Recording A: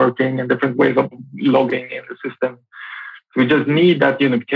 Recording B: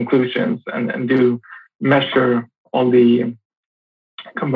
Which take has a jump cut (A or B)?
A